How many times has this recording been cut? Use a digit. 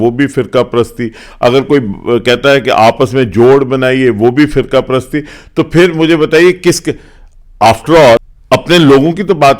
1